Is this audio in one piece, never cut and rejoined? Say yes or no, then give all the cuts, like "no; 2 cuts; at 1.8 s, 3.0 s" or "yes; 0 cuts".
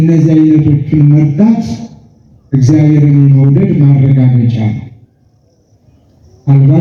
yes; 0 cuts